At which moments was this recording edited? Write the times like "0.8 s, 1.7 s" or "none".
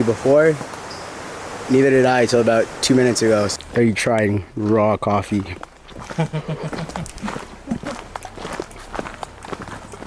3.5 s